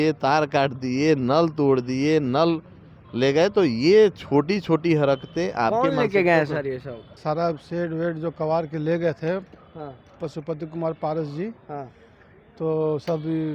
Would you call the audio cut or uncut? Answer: cut